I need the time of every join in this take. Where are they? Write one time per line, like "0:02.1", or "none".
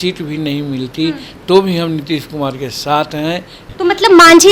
0:03.6